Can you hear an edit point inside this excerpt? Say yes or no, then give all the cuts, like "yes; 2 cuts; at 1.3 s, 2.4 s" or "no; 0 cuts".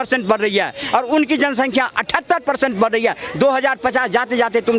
no; 0 cuts